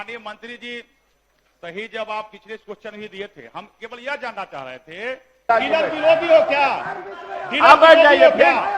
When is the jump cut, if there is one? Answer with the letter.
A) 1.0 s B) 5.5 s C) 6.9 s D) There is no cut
B